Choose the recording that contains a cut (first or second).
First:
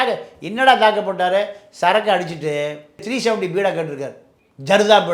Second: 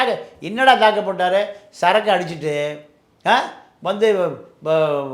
first